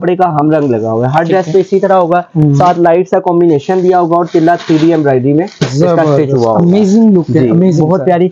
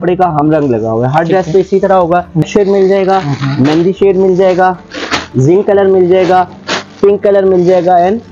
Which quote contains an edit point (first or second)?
second